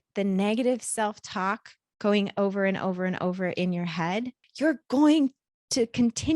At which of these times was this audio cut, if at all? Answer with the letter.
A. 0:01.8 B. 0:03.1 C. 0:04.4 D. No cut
C